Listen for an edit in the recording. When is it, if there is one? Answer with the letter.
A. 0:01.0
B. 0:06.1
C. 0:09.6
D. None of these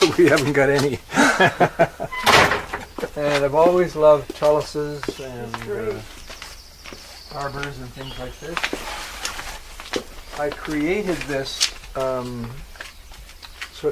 B